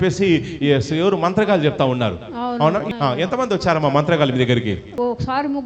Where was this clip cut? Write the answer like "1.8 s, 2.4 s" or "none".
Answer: 2.9 s, 4.9 s